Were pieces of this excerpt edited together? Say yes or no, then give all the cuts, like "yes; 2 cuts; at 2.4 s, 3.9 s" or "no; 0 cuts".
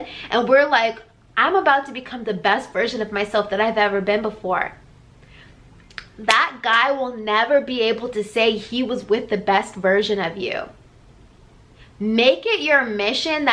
no; 0 cuts